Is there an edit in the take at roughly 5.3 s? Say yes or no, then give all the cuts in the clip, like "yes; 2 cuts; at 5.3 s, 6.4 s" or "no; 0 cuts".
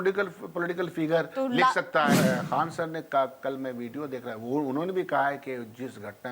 no; 1 cut; at 2.1 s